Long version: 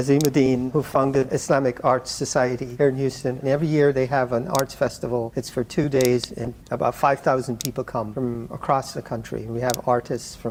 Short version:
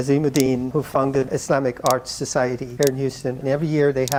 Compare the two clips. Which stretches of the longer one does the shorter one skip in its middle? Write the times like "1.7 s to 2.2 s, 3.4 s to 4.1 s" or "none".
none